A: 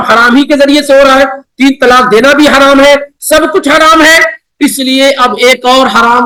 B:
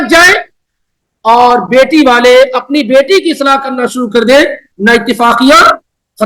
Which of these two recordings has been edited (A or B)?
B